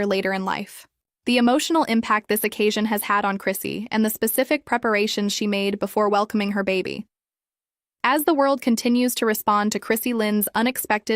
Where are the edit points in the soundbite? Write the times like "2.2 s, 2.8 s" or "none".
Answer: 8.7 s, 9.8 s